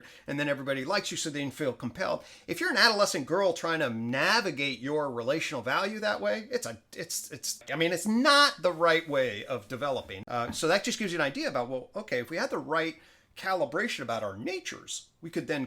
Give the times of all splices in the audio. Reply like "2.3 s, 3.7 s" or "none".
7.5 s, 10.1 s